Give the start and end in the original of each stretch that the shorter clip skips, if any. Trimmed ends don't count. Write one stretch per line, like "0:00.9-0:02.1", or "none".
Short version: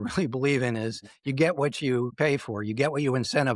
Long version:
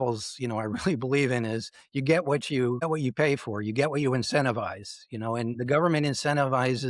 0:02.8-0:03.1

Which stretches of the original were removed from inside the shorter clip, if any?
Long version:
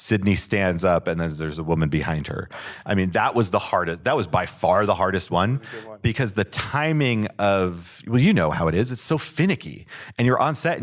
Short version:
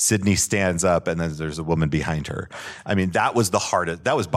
none

